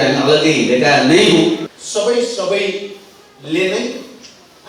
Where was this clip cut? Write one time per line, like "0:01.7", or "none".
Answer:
0:01.6

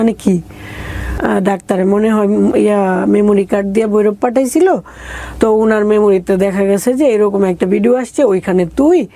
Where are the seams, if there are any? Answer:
0:01.1

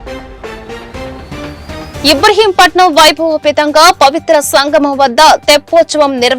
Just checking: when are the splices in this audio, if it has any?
0:01.9

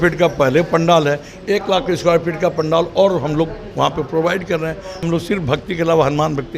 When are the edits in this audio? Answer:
0:05.0

